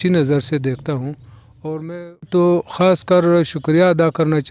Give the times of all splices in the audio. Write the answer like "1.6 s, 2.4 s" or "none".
2.3 s